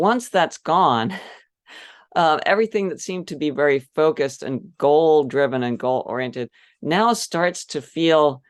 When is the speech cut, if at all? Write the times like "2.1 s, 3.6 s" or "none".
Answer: none